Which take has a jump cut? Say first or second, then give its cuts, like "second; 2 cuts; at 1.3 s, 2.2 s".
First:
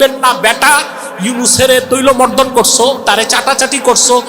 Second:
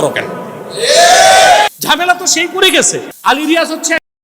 second; 2 cuts; at 1.8 s, 3.1 s